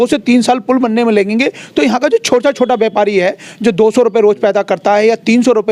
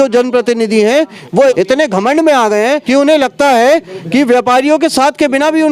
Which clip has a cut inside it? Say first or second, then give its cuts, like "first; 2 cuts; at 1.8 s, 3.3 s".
second; 2 cuts; at 1.5 s, 2.8 s